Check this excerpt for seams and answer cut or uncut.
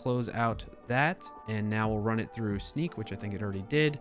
cut